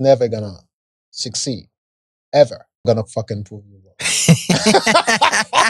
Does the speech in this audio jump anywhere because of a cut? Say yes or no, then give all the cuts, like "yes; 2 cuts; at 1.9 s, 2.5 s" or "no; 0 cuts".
yes; 1 cut; at 2.8 s